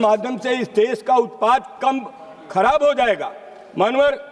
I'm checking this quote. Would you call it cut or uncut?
uncut